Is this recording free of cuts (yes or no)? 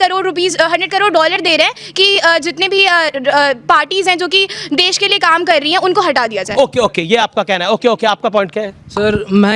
yes